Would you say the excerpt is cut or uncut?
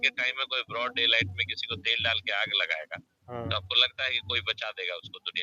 uncut